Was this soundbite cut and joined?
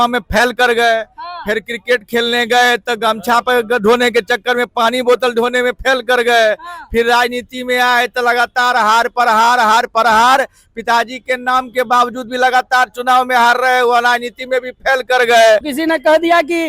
yes; 1 cut; at 15.7 s

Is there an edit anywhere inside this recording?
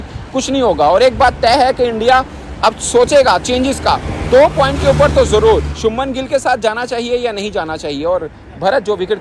no; 0 cuts

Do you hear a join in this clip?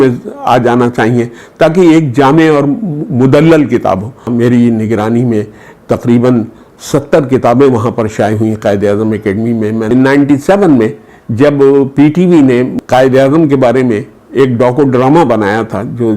yes; 3 cuts; at 4.3 s, 9.9 s, 12.8 s

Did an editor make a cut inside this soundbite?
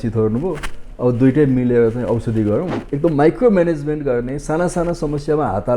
yes; 1 cut; at 2.8 s

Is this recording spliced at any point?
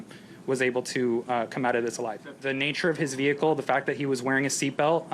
yes; 1 cut; at 2.3 s

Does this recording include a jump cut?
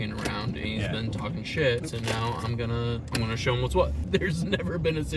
yes; 3 cuts; at 1.9 s, 3.1 s, 4.0 s

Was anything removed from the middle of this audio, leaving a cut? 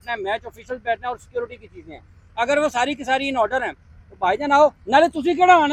no; 0 cuts

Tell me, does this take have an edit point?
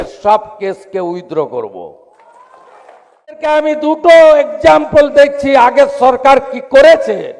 yes; 1 cut; at 3.4 s

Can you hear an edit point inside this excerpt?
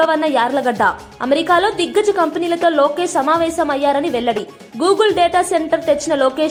no; 0 cuts

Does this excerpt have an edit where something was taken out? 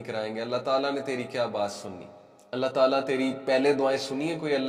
no; 0 cuts

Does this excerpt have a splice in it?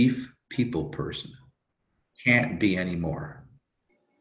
yes; 1 cut; at 2.1 s

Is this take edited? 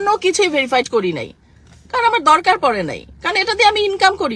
no; 0 cuts

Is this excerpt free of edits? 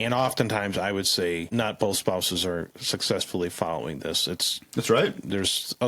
no; 1 cut; at 1.5 s

